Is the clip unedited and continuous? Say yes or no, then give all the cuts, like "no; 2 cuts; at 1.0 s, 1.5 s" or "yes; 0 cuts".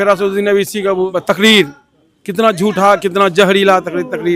no; 1 cut; at 1.1 s